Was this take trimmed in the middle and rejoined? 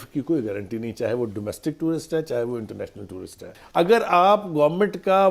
yes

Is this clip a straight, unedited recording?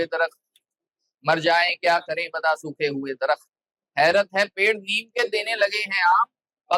yes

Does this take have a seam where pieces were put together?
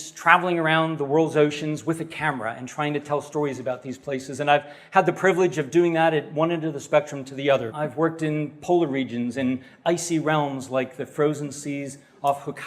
yes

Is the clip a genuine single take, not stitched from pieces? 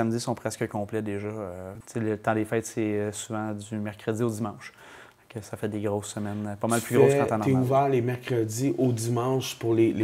no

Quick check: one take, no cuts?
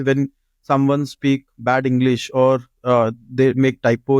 yes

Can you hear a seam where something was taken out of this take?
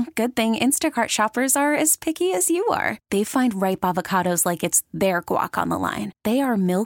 no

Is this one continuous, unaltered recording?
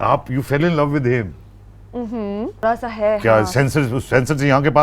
no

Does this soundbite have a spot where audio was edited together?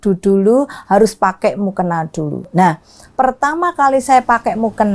no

